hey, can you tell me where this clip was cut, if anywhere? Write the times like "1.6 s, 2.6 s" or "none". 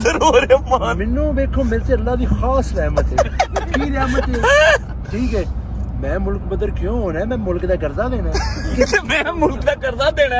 none